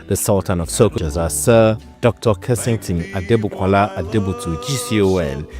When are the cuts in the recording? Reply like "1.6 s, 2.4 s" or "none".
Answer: 1.0 s